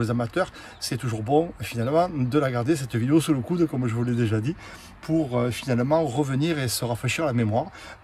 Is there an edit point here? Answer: no; 0 cuts

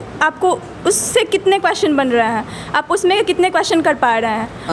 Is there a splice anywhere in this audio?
no; 0 cuts

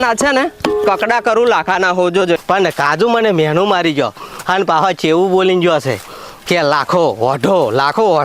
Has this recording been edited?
yes; 1 cut; at 2.4 s

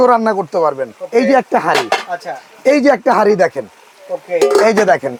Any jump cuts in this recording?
no; 0 cuts

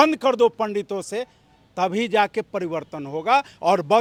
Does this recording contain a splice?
no; 0 cuts

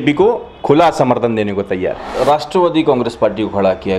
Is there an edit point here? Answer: yes; 1 cut; at 2.1 s

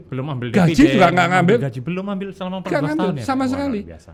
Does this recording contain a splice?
no; 0 cuts

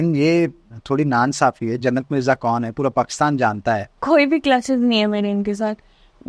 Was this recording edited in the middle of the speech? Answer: yes; 1 cut; at 3.9 s

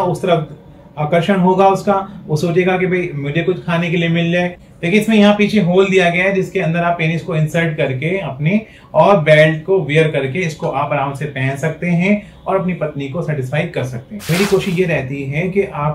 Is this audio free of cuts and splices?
no; 2 cuts; at 4.6 s, 14.2 s

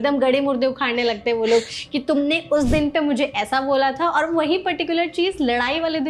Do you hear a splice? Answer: no; 0 cuts

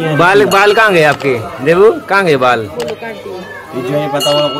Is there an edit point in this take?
no; 0 cuts

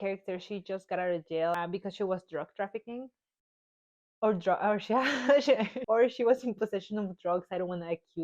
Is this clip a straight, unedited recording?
no; 2 cuts; at 1.6 s, 5.7 s

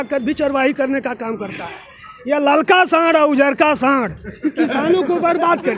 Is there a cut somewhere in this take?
no; 0 cuts

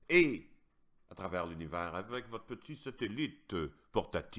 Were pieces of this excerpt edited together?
no; 0 cuts

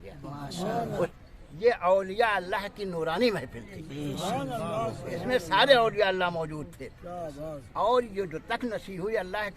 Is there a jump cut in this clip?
yes; 1 cut; at 1.1 s

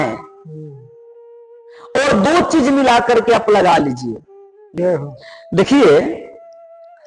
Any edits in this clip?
yes; 1 cut; at 4.8 s

